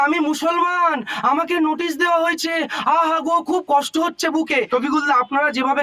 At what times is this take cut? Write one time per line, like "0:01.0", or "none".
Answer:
0:04.7